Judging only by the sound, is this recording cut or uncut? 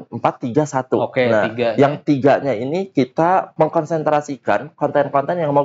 cut